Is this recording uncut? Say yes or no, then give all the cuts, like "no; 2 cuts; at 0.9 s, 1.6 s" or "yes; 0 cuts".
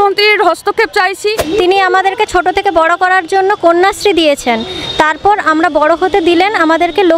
no; 1 cut; at 1.4 s